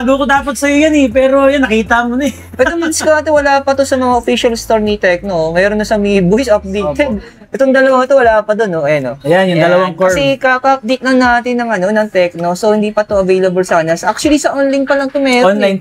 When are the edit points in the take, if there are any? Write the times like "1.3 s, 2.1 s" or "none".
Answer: none